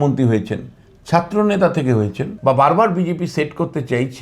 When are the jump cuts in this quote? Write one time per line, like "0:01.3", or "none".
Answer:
0:02.2